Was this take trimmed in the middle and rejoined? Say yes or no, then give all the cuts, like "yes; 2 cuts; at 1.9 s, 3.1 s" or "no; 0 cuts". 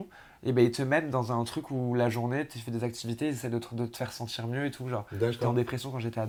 no; 0 cuts